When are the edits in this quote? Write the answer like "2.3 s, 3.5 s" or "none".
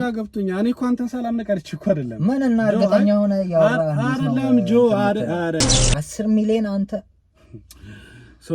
5.8 s